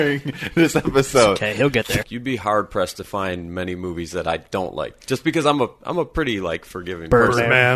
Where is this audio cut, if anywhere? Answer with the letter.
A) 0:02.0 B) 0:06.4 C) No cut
A